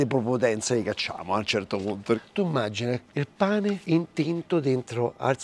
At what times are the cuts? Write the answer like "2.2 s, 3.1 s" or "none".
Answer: 2.2 s, 3.8 s